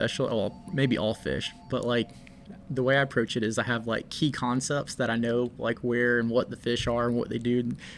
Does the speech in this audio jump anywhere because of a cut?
no; 0 cuts

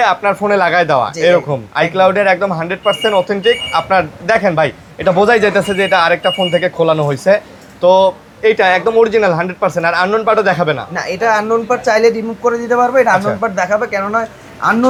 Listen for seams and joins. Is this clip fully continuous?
yes; 0 cuts

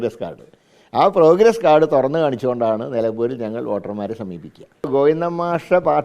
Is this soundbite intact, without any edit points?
no; 1 cut; at 4.9 s

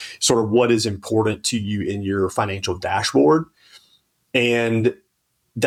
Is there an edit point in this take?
no; 0 cuts

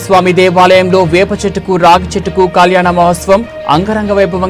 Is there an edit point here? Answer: no; 0 cuts

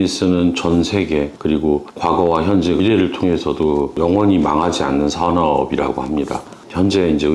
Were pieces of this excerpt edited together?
no; 0 cuts

